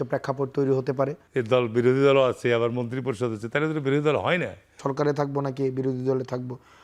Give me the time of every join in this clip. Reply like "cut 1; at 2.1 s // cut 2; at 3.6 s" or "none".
cut 1; at 1.2 s // cut 2; at 4.8 s